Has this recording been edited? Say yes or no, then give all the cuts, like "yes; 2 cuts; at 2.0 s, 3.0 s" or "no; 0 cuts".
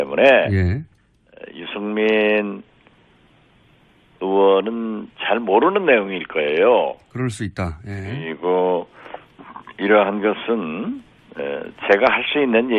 no; 0 cuts